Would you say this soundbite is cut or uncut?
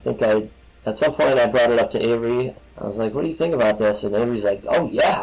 cut